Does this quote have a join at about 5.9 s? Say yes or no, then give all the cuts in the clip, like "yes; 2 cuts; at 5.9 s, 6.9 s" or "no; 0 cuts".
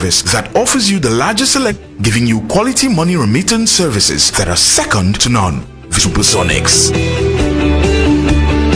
yes; 2 cuts; at 1.8 s, 5.9 s